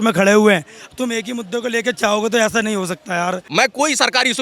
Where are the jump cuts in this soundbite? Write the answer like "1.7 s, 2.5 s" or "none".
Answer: 3.4 s